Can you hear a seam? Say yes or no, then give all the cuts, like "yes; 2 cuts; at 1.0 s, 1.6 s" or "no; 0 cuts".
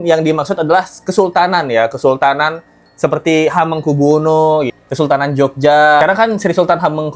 no; 0 cuts